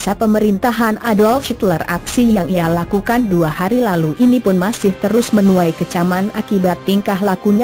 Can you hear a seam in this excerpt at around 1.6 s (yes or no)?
yes